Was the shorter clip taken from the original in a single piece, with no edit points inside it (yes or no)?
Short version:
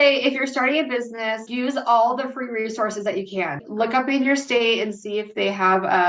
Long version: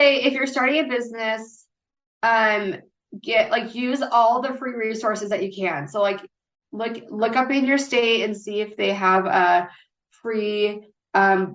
no